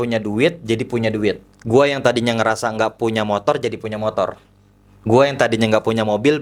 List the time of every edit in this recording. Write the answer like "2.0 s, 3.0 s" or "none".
none